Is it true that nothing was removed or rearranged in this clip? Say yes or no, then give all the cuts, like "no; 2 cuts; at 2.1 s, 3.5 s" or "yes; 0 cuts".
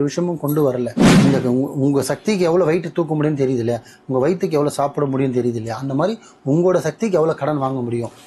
no; 1 cut; at 1.0 s